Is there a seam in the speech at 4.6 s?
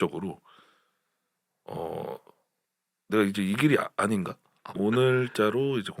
yes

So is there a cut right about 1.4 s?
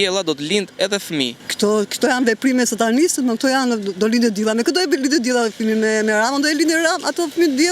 yes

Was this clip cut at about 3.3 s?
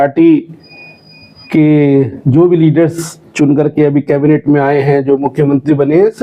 no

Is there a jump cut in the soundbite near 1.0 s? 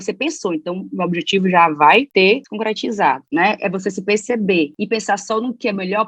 no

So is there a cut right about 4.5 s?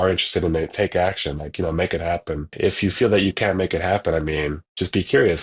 no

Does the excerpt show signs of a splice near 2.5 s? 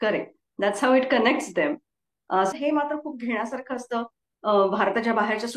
yes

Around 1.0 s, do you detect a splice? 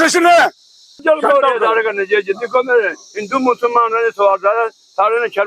yes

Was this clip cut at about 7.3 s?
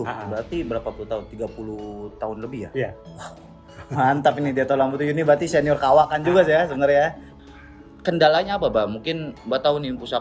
yes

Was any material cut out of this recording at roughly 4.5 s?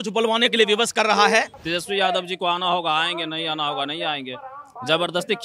no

